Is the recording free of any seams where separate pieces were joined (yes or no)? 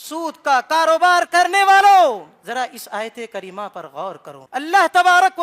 no